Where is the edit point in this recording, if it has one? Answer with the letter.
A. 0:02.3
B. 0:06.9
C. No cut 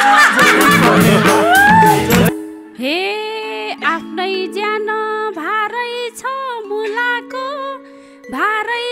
A